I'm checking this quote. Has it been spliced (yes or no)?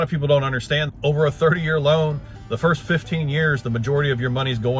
yes